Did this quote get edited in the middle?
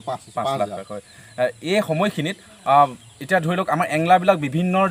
no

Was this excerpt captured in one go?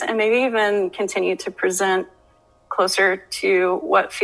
no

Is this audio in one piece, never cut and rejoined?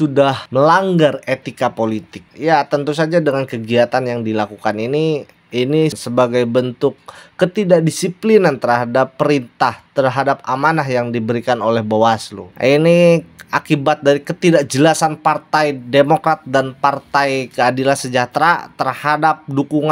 no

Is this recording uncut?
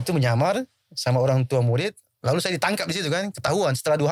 yes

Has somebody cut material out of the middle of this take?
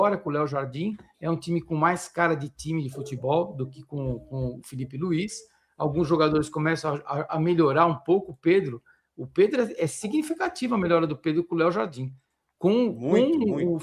no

